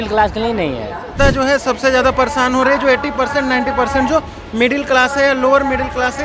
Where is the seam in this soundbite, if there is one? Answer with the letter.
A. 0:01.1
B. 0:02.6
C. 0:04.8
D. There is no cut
A